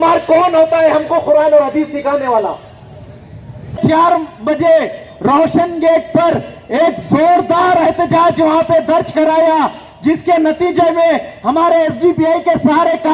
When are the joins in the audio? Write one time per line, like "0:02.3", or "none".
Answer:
0:03.8